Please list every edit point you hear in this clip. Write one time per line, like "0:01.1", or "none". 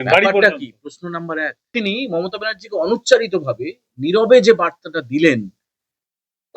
0:01.8